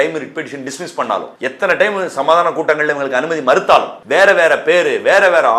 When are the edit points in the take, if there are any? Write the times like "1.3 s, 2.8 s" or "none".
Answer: 1.3 s, 4.0 s